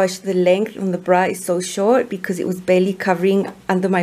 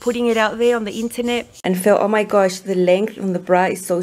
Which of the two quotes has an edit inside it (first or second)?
second